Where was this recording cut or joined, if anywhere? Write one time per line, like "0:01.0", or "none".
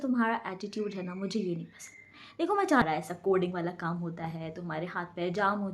0:02.8